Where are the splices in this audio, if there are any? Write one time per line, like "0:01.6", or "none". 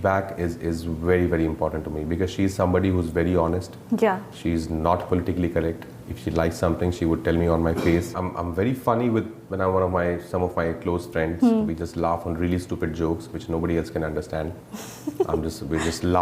0:08.1